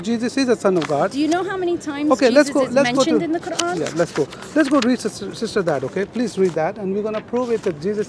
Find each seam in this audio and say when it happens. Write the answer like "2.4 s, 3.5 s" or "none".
none